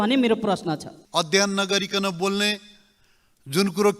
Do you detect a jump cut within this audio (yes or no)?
yes